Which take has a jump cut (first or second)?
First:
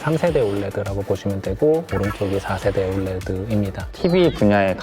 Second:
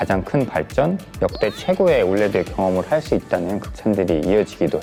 first